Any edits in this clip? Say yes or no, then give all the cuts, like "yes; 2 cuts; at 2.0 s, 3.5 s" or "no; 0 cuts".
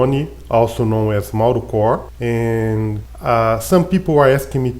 yes; 2 cuts; at 2.1 s, 3.1 s